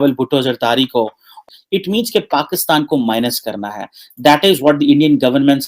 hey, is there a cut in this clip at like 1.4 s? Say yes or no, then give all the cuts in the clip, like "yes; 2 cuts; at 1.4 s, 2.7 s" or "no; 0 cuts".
yes; 1 cut; at 1.4 s